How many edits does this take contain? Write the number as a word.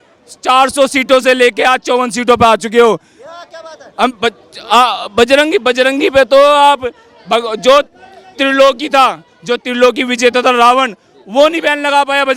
zero